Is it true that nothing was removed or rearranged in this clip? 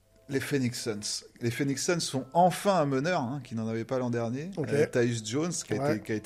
yes; 0 cuts

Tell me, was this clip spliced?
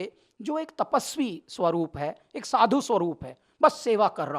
no; 0 cuts

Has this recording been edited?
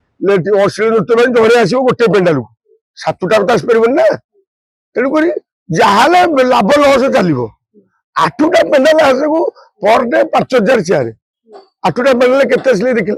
no; 0 cuts

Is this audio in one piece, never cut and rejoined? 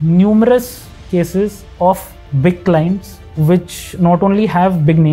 yes; 0 cuts

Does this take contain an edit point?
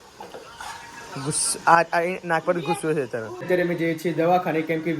yes; 1 cut; at 3.4 s

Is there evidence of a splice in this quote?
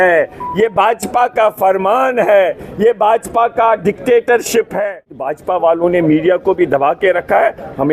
yes; 1 cut; at 5.1 s

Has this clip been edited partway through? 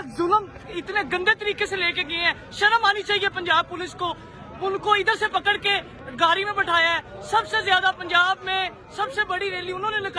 no; 0 cuts

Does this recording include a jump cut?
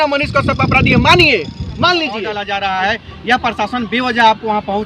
yes; 1 cut; at 2.4 s

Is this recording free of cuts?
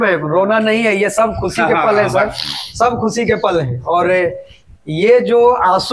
yes; 0 cuts

